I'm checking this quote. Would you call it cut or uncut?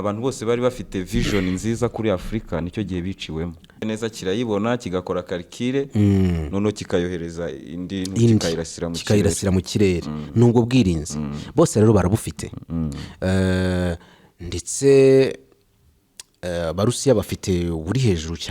cut